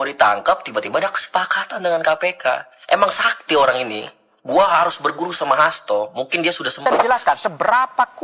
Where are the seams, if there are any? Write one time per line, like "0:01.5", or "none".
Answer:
0:06.7